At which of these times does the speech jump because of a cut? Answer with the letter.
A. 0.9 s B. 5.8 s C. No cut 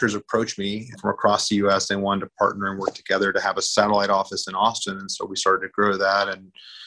A